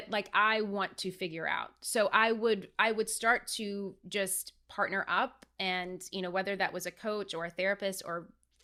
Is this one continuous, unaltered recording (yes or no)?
yes